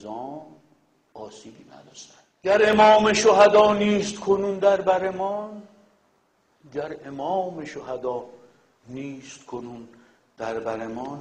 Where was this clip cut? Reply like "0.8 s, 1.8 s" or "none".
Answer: 2.7 s

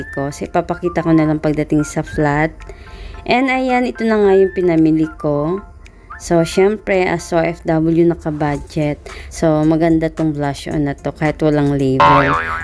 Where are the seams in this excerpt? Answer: 8.9 s

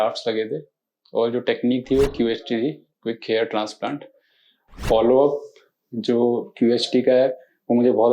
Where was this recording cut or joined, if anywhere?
4.7 s

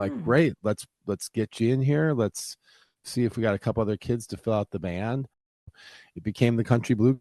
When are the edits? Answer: 5.8 s

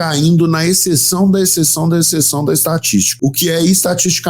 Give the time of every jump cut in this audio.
3.1 s

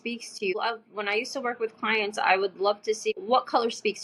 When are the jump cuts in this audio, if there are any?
3.1 s

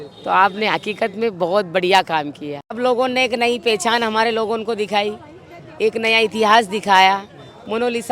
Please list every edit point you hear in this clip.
2.7 s

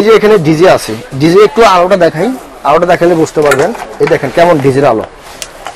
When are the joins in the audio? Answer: none

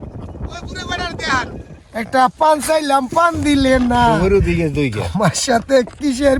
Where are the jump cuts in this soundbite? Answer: 1.6 s

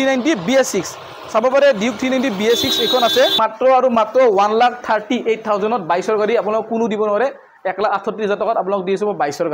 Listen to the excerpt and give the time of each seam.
3.4 s

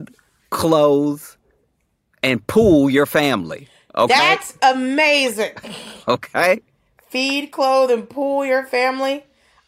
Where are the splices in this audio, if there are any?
none

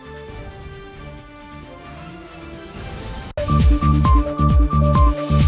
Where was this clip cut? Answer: 3.3 s

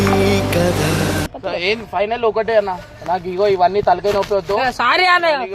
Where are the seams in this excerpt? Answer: 1.2 s

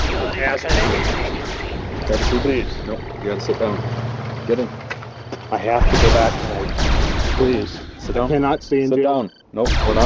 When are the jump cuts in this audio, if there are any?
none

